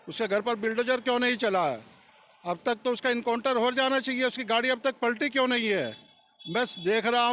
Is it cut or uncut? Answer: uncut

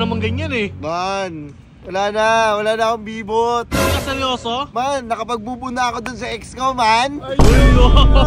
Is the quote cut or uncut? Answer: uncut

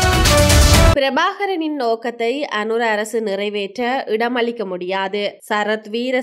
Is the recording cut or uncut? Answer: cut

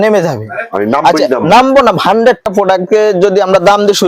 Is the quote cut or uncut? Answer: cut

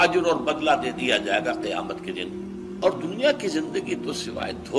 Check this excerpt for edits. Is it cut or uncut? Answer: cut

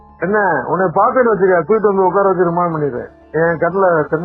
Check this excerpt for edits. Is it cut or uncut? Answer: uncut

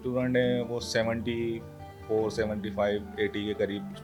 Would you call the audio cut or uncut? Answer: uncut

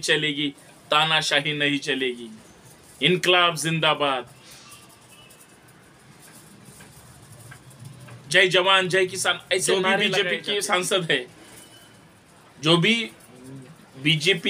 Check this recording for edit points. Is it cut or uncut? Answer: cut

